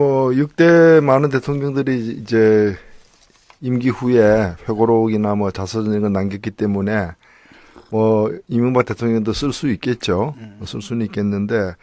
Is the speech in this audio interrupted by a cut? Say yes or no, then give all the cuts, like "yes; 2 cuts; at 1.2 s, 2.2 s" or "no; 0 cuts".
no; 0 cuts